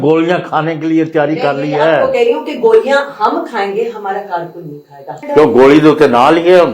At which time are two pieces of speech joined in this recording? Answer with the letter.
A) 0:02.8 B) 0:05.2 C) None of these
B